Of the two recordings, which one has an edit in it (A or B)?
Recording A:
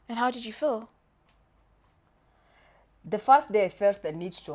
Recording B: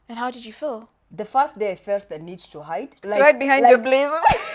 B